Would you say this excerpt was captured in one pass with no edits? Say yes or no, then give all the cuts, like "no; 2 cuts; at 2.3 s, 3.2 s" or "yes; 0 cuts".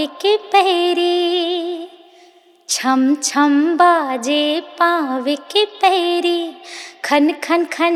yes; 0 cuts